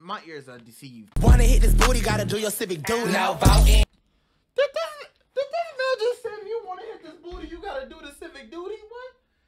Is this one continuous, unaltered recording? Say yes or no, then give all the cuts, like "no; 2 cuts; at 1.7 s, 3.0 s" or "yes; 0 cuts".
no; 1 cut; at 1.1 s